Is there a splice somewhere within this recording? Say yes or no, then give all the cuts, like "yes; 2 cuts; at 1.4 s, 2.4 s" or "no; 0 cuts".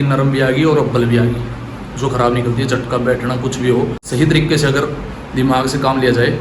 yes; 1 cut; at 4.0 s